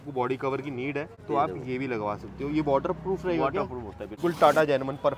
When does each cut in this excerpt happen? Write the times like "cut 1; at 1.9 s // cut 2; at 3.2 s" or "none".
cut 1; at 1.2 s // cut 2; at 4.2 s